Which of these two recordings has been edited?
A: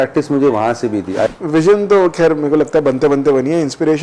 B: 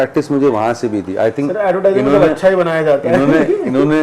A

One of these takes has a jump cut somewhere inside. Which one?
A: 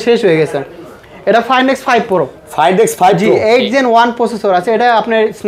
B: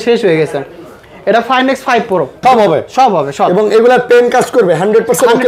B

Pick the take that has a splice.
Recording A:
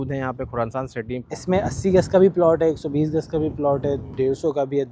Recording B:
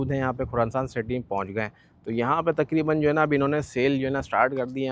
A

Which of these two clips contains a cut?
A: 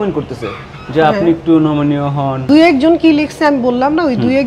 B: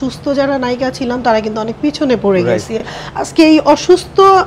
A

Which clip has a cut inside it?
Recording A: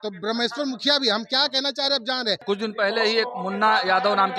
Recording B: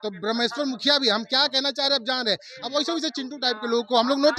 A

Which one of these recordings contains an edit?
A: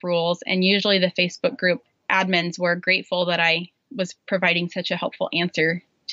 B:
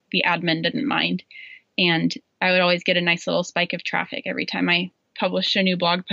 B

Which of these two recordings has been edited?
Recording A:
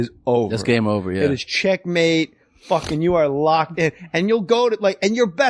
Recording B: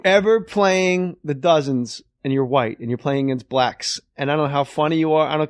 A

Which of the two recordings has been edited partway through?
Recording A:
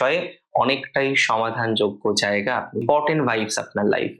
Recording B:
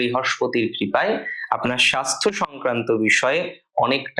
A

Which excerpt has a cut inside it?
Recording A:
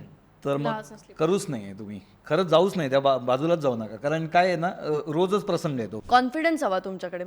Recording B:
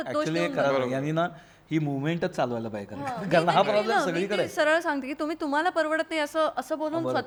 A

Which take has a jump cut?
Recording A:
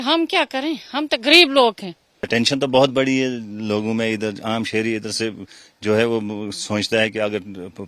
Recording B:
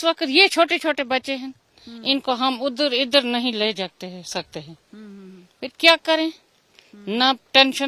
A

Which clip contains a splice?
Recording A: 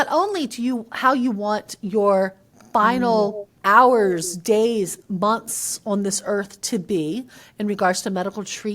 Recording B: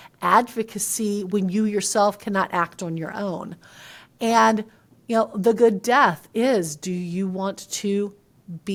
A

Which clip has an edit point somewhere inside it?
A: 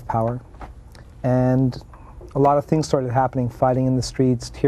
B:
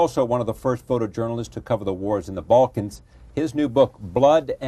B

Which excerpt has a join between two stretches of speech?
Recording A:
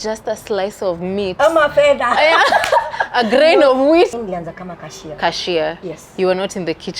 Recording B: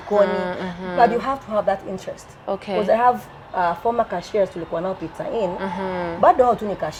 A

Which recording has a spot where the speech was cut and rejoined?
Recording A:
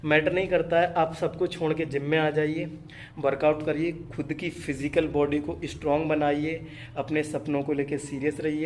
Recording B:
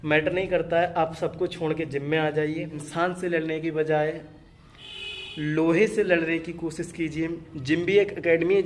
B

